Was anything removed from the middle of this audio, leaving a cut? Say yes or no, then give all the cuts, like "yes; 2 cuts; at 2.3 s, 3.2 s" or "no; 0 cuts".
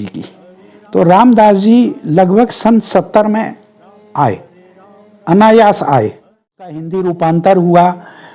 yes; 1 cut; at 6.9 s